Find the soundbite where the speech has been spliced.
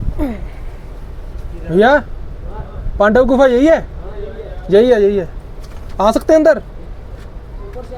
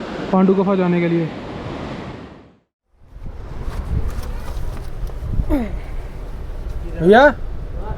second; 1 cut; at 2.4 s

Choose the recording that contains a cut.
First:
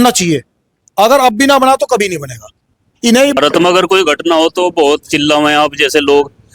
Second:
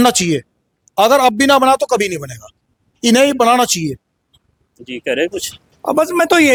first; 1 cut; at 3.4 s

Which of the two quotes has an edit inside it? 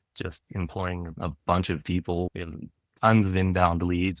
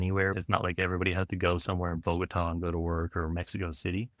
first; 1 cut; at 2.3 s

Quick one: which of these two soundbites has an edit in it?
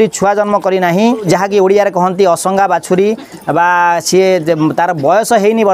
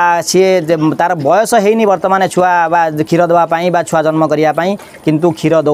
first; 1 cut; at 1.3 s

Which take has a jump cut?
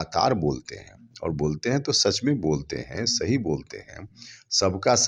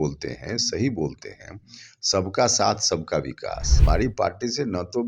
second; 1 cut; at 3.7 s

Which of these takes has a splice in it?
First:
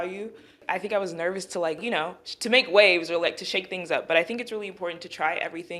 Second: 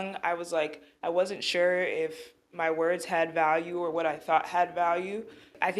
first; 1 cut; at 1.8 s

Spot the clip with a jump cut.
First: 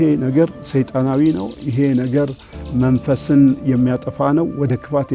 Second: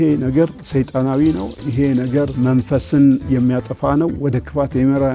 second; 1 cut; at 2.3 s

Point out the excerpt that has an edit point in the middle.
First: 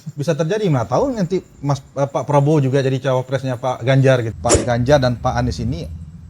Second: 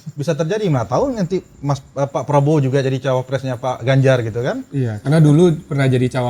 first; 1 cut; at 4.3 s

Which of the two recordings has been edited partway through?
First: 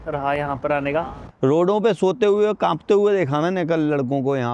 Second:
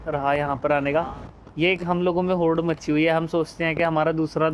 first; 1 cut; at 1.2 s

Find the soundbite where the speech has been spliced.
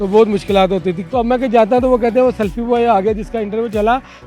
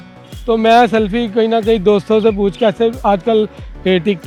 first; 1 cut; at 1.0 s

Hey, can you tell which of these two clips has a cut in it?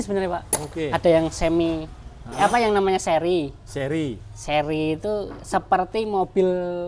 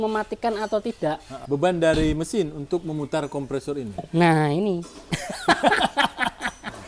second; 1 cut; at 1.3 s

